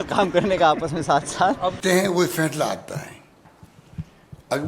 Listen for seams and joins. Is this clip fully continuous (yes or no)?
no